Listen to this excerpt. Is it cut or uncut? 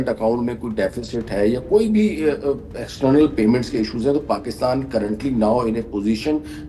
uncut